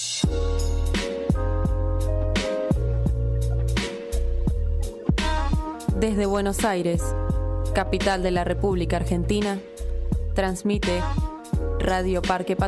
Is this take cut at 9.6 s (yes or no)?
no